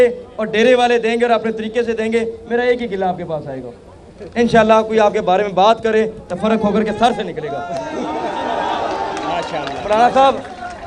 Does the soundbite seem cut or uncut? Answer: uncut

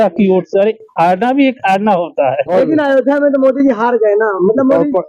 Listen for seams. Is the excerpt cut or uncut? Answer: cut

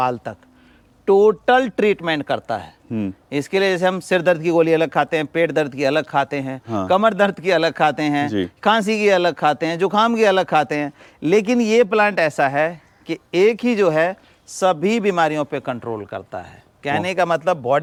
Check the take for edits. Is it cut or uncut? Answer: uncut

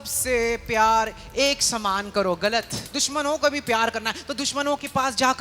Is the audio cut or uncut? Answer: cut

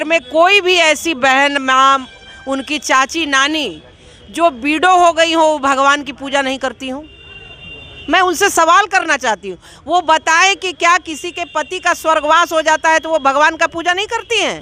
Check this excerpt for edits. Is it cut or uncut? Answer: uncut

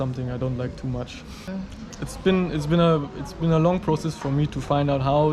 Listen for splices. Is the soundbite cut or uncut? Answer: cut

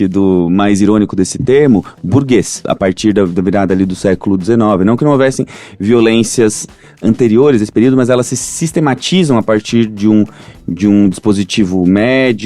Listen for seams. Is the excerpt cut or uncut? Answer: cut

